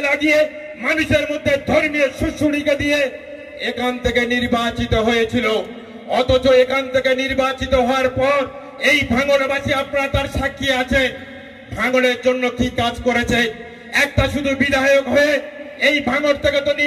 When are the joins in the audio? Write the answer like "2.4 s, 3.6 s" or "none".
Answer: none